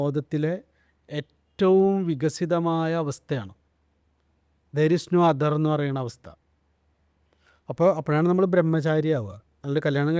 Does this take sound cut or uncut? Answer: uncut